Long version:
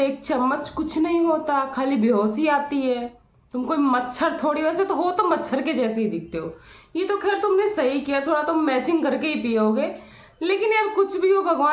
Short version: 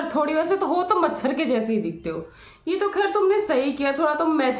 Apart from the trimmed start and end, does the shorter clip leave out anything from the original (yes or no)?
no